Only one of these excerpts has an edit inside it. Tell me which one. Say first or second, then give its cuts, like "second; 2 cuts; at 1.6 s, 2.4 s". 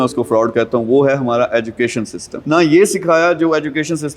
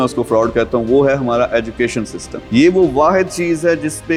first; 1 cut; at 2.4 s